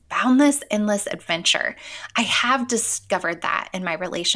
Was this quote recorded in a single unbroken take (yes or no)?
yes